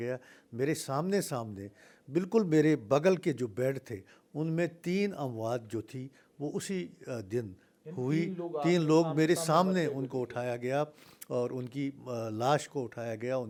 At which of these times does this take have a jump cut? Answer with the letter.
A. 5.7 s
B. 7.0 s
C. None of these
C